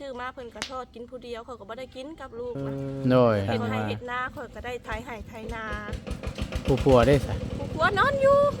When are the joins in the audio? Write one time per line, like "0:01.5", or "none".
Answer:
0:03.5